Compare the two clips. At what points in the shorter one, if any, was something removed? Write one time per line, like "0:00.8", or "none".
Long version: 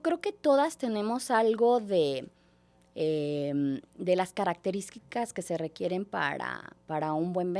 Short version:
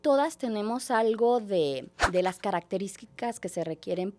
0:02.0